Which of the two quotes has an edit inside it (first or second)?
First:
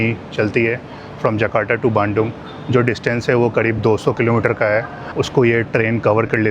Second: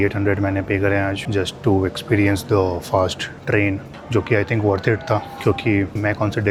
first